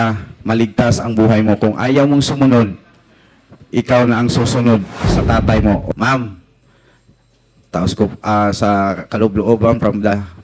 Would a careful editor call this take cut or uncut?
cut